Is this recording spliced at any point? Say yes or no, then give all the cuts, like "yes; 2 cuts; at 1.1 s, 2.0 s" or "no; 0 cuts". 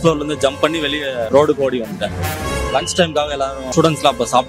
yes; 3 cuts; at 1.2 s, 2.4 s, 3.6 s